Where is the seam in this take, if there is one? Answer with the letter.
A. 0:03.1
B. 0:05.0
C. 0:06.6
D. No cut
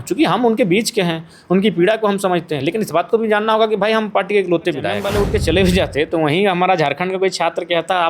B